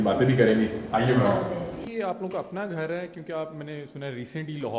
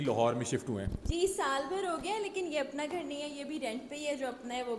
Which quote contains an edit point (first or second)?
first